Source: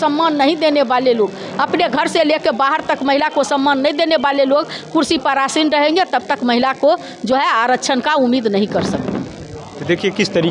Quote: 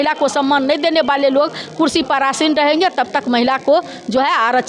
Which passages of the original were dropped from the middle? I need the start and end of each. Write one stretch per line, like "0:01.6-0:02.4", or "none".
none